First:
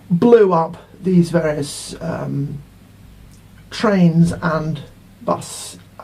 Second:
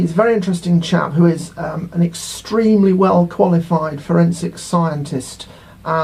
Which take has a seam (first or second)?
first